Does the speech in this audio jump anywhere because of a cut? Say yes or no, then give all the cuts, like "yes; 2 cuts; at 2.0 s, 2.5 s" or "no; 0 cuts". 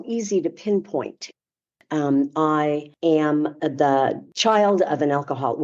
yes; 3 cuts; at 1.6 s, 3.2 s, 4.3 s